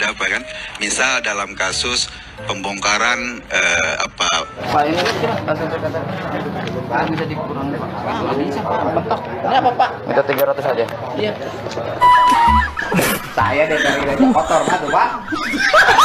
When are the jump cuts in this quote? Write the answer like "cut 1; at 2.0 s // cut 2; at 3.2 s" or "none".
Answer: cut 1; at 4.6 s // cut 2; at 12.0 s